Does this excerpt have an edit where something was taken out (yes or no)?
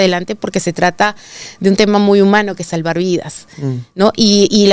no